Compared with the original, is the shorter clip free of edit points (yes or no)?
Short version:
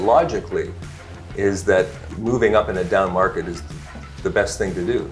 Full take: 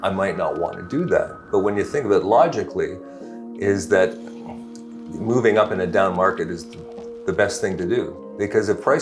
no